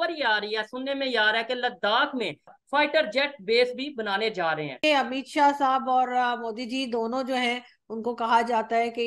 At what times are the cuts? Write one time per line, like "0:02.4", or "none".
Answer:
0:02.6
0:04.7